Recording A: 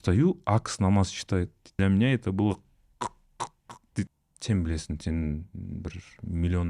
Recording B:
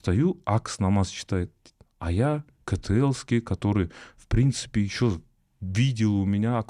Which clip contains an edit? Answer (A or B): A